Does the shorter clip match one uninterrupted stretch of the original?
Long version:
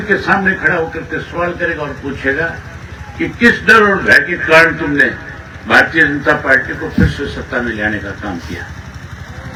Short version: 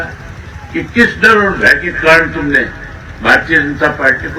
yes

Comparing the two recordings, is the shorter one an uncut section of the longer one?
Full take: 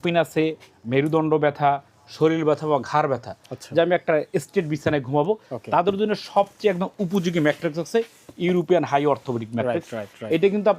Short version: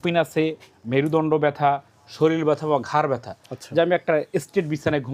yes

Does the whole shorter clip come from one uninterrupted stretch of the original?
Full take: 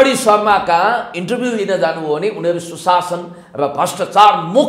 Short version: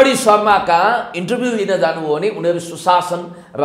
yes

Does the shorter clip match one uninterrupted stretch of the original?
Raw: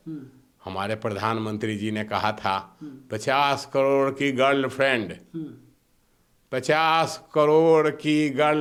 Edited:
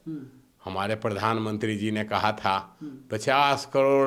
yes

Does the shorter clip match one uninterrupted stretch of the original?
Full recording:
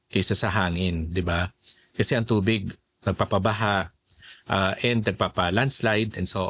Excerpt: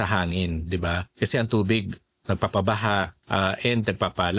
no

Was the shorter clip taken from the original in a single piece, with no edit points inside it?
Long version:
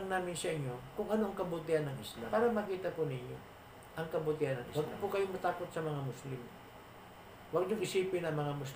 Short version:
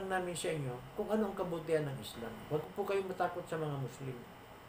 no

